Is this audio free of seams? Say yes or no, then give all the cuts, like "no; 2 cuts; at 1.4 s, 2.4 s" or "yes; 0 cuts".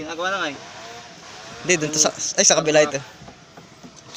yes; 0 cuts